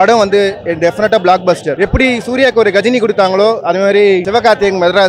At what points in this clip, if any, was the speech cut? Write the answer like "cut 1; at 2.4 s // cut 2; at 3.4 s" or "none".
cut 1; at 1.7 s // cut 2; at 4.3 s